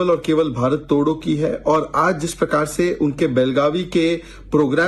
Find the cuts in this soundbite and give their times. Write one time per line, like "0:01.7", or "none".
0:01.4